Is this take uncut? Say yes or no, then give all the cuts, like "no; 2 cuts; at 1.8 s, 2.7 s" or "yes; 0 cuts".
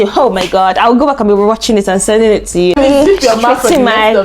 no; 1 cut; at 2.7 s